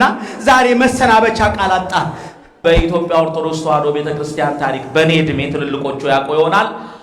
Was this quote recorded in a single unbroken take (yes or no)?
no